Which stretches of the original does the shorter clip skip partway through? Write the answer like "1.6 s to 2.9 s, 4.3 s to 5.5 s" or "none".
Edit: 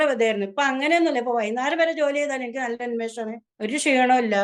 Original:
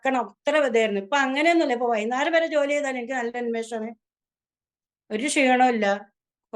4.0 s to 5.0 s